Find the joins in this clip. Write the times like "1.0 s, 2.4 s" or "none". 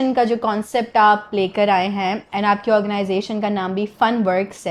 none